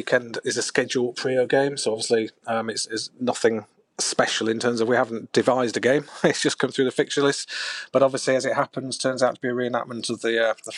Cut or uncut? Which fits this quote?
uncut